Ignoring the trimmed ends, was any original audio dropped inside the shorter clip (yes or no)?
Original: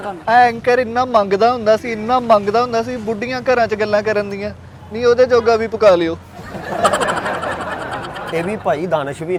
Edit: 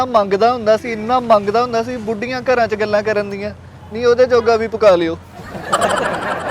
no